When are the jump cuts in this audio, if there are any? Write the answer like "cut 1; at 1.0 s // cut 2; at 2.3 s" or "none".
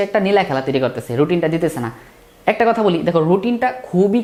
none